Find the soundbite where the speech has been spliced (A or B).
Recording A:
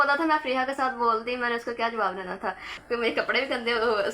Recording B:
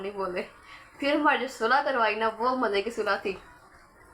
A